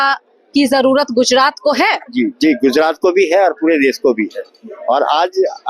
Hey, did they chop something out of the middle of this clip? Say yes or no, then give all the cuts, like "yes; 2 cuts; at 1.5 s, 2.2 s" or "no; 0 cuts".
no; 0 cuts